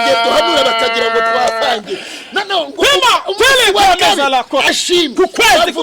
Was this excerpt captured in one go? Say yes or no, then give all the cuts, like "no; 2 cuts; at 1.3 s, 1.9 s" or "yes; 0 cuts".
no; 1 cut; at 4.7 s